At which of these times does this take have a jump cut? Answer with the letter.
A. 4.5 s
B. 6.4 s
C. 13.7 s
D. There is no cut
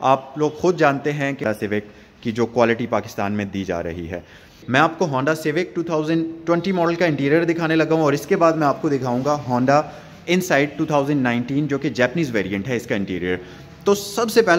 A